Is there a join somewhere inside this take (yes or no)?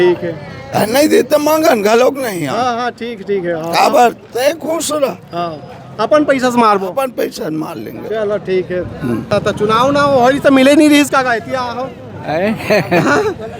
yes